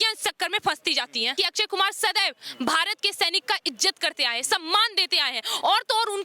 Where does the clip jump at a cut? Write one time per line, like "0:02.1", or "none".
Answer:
0:01.3

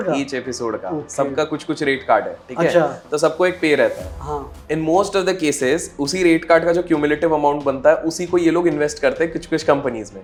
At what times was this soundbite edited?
none

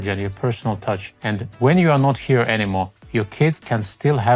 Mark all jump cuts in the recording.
0:01.1
0:03.0

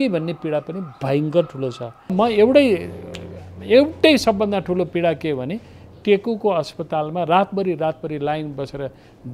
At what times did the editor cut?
0:02.1

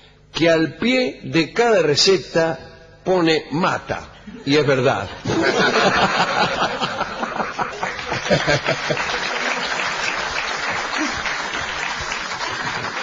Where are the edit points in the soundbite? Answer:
0:09.8

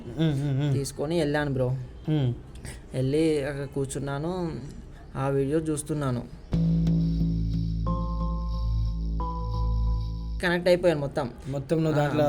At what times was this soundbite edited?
0:10.3

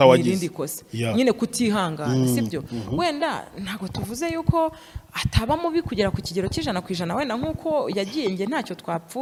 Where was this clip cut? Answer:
none

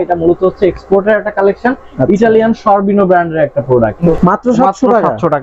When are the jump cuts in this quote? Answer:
0:04.1

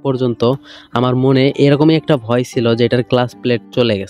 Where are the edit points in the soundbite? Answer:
none

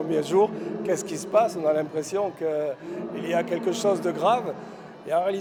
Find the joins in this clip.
none

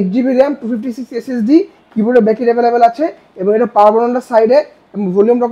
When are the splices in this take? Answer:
none

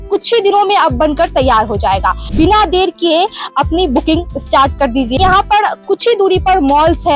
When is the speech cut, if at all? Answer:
0:02.3
0:05.2

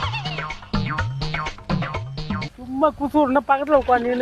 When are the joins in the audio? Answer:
0:02.4

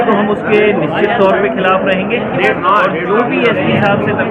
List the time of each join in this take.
none

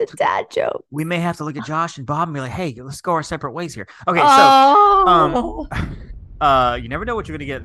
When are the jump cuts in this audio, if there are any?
0:06.2

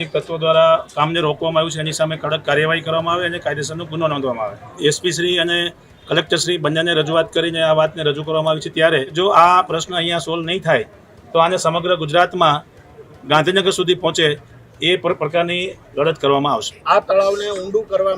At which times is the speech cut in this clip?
0:04.7
0:09.1
0:16.7

